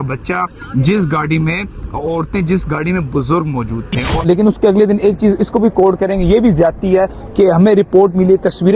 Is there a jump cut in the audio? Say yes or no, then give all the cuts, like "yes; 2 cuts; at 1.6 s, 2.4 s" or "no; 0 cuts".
yes; 1 cut; at 4.1 s